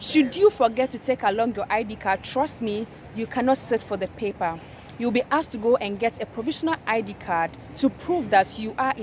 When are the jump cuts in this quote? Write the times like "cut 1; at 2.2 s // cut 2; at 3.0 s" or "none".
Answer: none